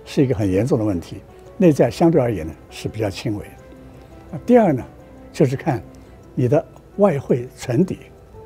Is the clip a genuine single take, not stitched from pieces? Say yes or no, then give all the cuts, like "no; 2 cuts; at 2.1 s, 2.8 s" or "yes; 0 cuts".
yes; 0 cuts